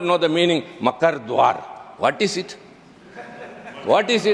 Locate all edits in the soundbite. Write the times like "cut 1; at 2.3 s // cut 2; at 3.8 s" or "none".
none